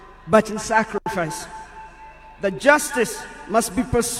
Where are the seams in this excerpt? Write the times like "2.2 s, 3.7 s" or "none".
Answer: none